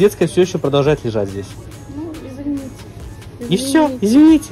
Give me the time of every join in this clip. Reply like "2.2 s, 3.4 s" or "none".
1.8 s